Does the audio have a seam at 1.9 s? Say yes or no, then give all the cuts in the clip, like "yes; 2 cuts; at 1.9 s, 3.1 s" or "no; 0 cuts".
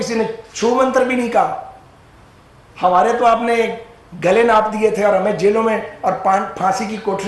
no; 0 cuts